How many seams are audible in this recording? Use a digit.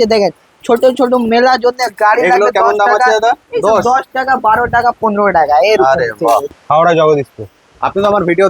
1